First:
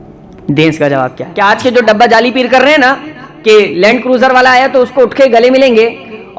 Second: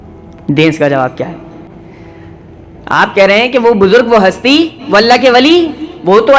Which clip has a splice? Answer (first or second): first